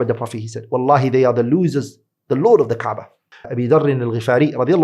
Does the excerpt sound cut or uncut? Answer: cut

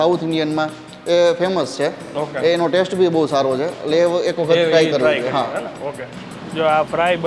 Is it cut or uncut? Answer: cut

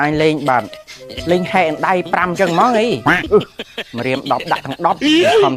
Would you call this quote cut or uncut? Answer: uncut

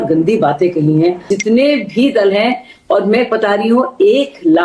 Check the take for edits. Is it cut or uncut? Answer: cut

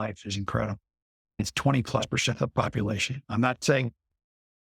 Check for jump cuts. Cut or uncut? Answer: cut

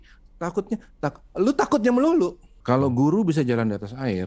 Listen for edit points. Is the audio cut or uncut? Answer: cut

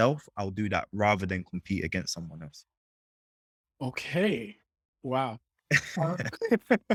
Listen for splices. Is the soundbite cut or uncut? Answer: uncut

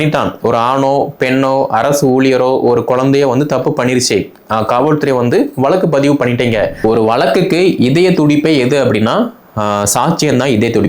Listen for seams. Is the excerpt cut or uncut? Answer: cut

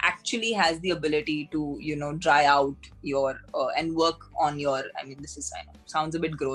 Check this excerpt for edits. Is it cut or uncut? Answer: uncut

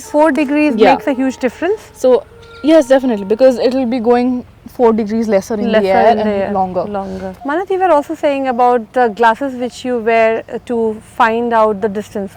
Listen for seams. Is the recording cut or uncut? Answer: cut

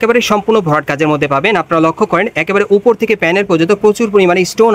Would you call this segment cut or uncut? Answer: uncut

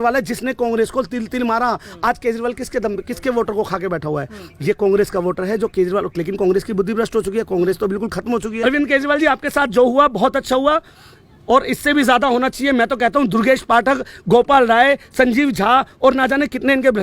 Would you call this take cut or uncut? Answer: cut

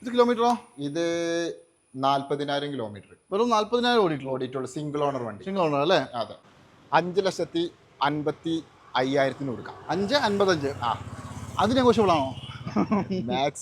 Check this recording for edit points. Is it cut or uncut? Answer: cut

